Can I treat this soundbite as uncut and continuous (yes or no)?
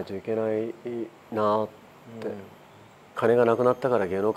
no